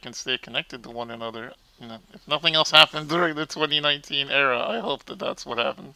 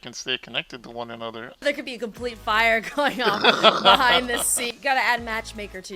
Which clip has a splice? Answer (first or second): second